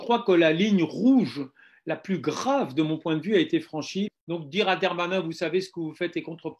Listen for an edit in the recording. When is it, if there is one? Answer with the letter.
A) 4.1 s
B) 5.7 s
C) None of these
A